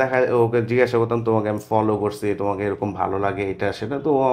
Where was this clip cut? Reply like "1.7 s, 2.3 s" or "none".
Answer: none